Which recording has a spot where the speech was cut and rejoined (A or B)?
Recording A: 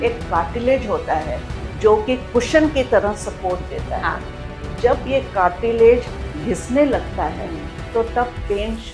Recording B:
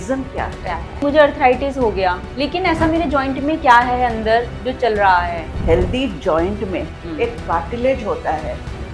B